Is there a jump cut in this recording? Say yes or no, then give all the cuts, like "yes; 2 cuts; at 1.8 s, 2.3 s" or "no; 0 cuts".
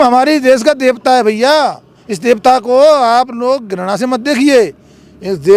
no; 0 cuts